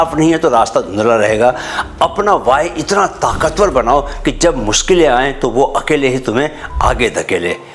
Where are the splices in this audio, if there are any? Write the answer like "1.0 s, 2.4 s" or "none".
none